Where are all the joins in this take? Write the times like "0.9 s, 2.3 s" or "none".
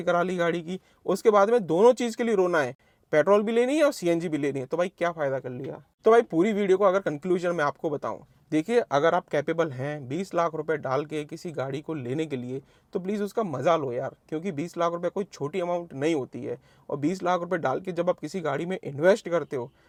none